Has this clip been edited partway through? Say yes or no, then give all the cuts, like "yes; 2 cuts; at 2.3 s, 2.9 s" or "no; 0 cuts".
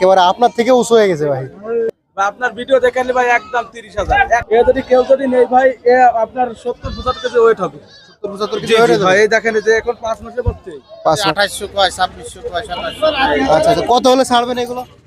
yes; 3 cuts; at 1.9 s, 4.4 s, 11.2 s